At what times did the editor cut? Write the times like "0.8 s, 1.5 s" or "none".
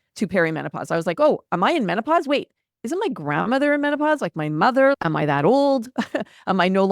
5.0 s